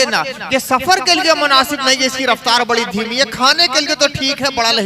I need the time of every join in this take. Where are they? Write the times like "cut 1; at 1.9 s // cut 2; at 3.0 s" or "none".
none

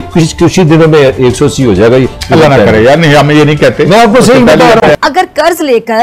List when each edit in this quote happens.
cut 1; at 4.8 s

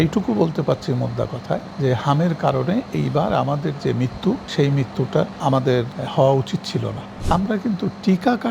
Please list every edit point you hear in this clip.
cut 1; at 1.7 s // cut 2; at 4.5 s // cut 3; at 5.7 s // cut 4; at 7.1 s

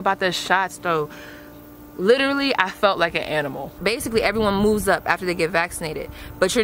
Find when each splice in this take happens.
cut 1; at 3.8 s

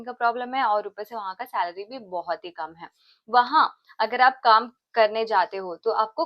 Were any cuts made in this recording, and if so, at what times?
none

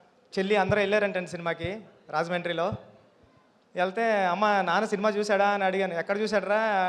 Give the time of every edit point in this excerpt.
none

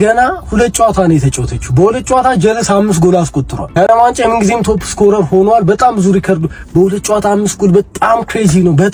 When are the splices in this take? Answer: none

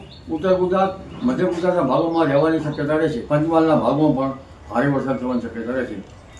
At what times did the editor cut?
cut 1; at 3.2 s

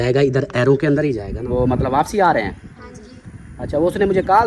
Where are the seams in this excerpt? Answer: cut 1; at 1.3 s

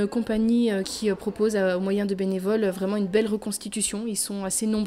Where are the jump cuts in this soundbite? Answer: cut 1; at 0.9 s

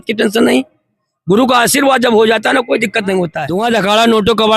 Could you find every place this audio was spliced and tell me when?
cut 1; at 3.4 s

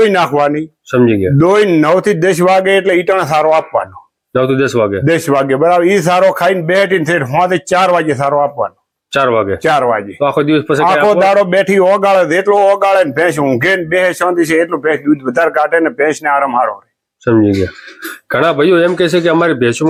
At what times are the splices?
none

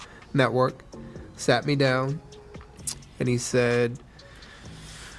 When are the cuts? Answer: none

